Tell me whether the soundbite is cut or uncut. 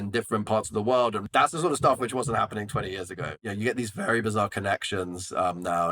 cut